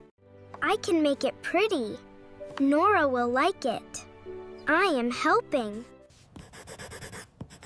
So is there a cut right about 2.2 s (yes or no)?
no